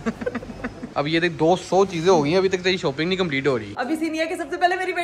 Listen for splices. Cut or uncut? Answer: cut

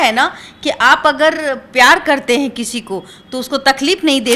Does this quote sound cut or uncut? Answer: uncut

